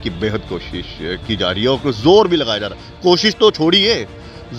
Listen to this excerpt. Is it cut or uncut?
uncut